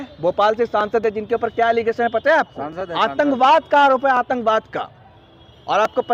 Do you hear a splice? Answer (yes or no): no